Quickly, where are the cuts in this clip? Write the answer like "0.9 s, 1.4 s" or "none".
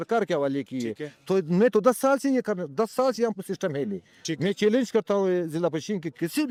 none